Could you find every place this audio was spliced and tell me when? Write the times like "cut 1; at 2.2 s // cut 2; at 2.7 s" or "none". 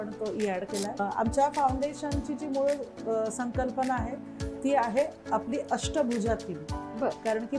cut 1; at 1.0 s